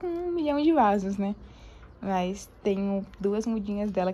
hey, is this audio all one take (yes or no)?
yes